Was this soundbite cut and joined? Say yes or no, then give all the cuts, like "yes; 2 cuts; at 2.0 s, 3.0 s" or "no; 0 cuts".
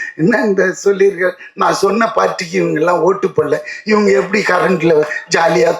no; 0 cuts